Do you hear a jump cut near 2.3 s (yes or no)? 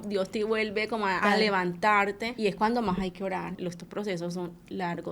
yes